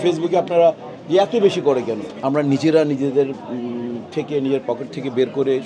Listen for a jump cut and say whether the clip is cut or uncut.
cut